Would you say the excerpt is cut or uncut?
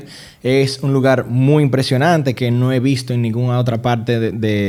uncut